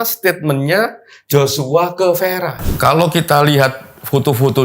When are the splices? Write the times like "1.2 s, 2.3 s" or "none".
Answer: 2.6 s